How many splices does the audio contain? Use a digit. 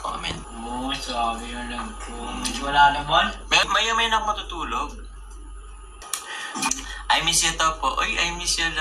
1